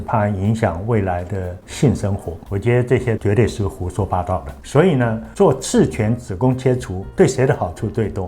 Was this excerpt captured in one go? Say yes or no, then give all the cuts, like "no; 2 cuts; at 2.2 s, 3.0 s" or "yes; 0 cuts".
no; 2 cuts; at 2.3 s, 4.6 s